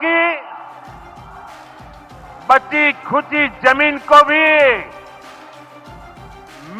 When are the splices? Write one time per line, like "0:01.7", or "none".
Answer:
none